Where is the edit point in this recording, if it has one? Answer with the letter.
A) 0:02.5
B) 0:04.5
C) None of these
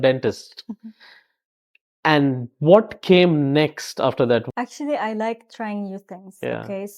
B